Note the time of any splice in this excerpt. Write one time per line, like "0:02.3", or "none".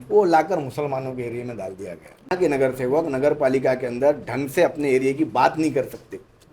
0:02.3